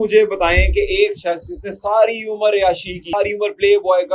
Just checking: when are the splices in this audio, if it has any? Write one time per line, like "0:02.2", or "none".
0:03.1